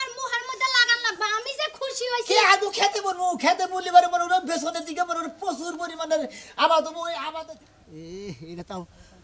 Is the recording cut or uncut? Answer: cut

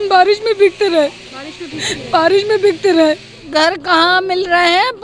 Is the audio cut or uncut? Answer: cut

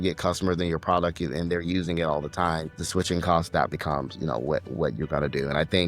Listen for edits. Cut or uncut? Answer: cut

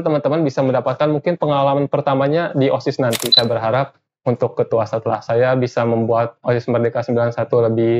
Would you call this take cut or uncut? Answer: cut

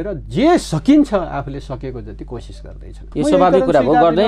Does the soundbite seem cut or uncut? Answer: cut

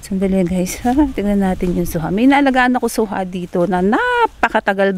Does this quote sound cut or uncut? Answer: uncut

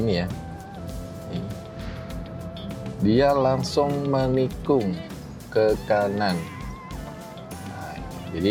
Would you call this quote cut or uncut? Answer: uncut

